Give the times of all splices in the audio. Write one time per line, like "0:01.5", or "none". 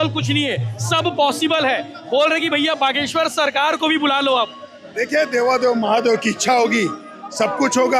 none